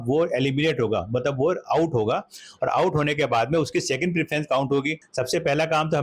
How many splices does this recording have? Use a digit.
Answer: 1